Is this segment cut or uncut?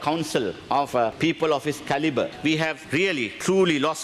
cut